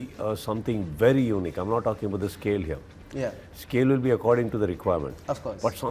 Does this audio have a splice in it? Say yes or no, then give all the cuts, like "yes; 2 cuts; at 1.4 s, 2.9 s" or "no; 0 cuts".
no; 0 cuts